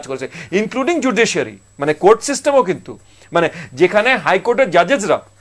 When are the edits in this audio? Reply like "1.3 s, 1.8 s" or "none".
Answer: none